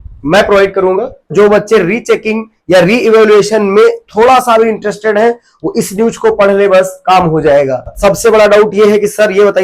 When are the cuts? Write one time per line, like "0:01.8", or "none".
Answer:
0:01.3
0:07.9